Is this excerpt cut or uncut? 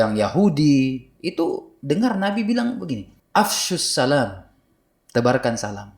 cut